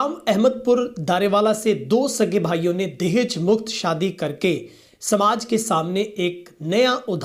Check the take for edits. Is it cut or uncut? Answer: uncut